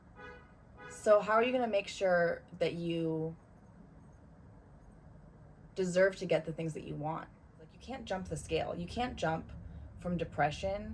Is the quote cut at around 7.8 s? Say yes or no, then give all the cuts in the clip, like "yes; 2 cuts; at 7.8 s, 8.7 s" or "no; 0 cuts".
yes; 1 cut; at 7.8 s